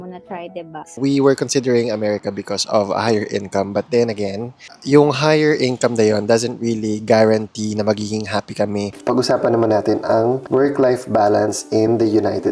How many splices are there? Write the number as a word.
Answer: three